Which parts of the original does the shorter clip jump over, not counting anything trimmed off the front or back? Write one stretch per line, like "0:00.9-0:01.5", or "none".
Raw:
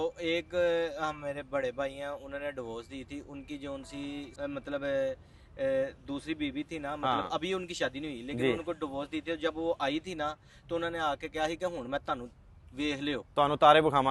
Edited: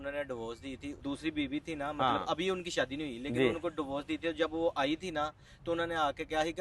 0:03.2-0:06.0

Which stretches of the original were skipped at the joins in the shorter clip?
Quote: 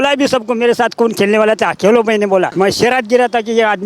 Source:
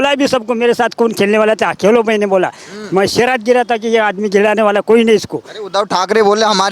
0:02.5-0:02.9

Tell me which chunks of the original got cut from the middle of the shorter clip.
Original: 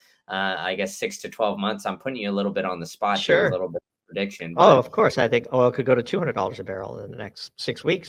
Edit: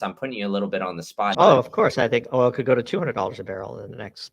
0:03.2-0:04.5

